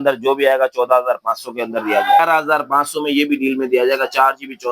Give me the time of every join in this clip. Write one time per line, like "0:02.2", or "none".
0:02.2